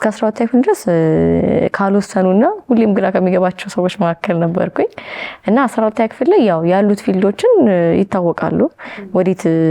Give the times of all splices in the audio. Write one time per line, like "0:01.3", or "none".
none